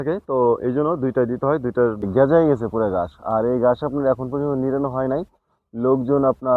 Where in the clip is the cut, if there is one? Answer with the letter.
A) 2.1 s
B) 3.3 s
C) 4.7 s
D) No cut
A